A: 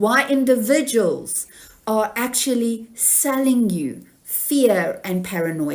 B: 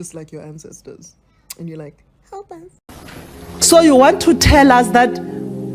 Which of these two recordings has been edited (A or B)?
B